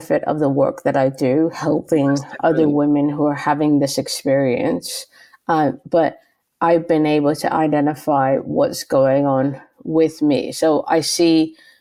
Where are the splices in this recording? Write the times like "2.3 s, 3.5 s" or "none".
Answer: none